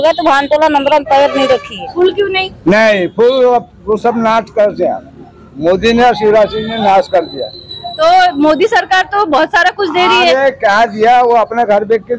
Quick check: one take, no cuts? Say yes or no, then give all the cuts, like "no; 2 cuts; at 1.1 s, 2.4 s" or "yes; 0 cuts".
no; 1 cut; at 1.9 s